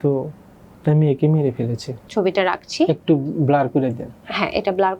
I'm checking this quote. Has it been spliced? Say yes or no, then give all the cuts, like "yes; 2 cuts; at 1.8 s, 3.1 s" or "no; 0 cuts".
yes; 1 cut; at 2.1 s